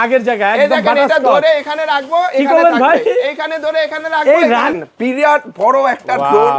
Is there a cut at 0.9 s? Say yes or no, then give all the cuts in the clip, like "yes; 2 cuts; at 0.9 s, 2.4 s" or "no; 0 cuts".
no; 1 cut; at 4.7 s